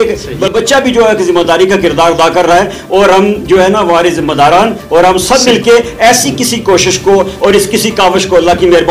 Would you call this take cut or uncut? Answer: uncut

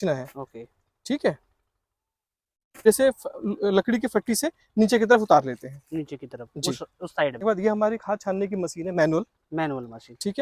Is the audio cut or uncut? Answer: cut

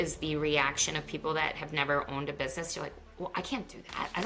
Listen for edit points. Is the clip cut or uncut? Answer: uncut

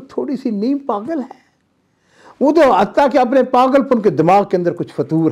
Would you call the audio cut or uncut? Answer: uncut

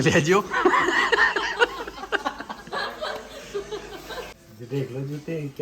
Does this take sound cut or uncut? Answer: cut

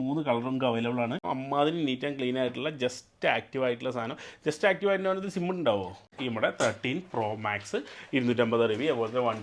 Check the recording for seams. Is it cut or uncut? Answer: cut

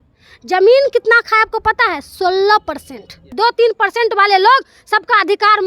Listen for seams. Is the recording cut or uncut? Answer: cut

